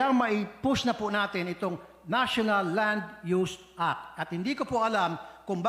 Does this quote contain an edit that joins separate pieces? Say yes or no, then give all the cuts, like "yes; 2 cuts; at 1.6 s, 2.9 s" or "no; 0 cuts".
no; 0 cuts